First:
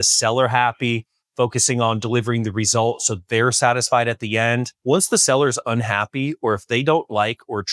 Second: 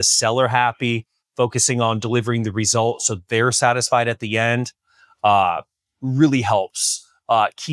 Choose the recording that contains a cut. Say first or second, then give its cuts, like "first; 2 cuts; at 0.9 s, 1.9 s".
first; 1 cut; at 4.7 s